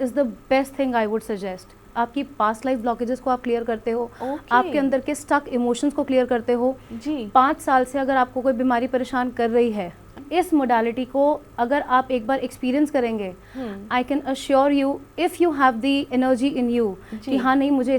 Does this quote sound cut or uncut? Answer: cut